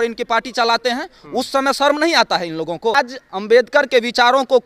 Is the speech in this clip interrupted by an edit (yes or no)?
yes